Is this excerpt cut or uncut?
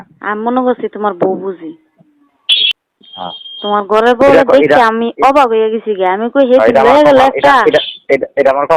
cut